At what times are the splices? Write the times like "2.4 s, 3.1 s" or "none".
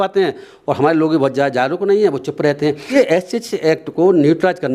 2.9 s